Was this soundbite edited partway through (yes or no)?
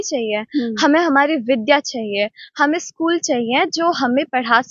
no